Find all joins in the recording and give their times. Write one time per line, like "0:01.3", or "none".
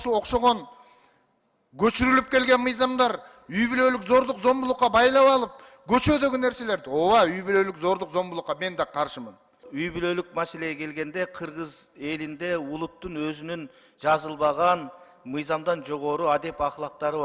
0:09.7